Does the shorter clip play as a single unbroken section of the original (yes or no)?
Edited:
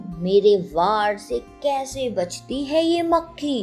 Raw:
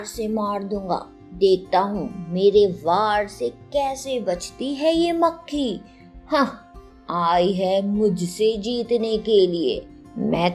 yes